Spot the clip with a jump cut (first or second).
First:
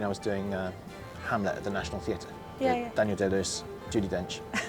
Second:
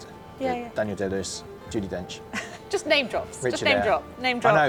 first